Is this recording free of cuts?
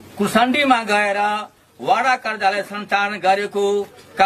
yes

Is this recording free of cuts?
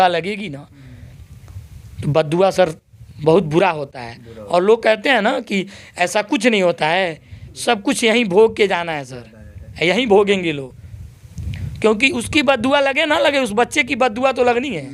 yes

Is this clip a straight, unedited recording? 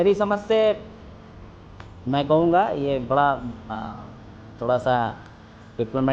yes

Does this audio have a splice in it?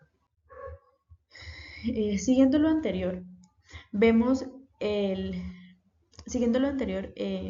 no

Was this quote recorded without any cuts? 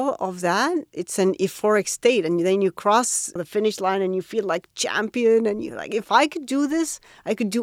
no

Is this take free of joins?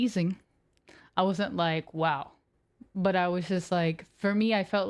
yes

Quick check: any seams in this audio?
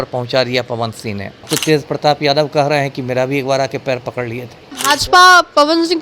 yes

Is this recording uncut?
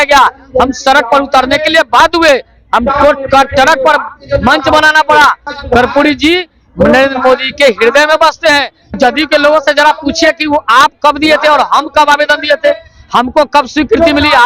no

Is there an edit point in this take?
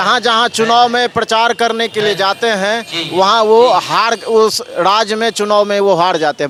no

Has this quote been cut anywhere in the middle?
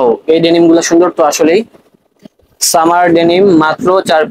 no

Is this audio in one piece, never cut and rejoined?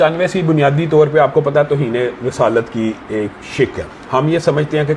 yes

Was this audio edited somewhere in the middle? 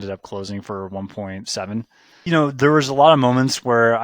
yes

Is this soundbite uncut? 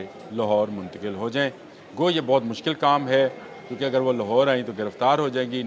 yes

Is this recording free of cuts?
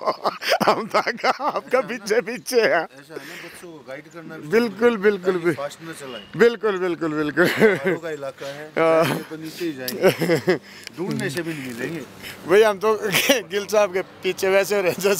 yes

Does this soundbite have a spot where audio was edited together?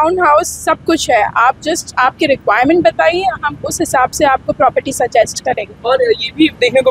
no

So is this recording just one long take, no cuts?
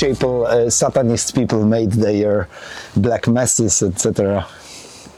yes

